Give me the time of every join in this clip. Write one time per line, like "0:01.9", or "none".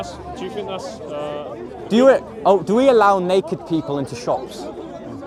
none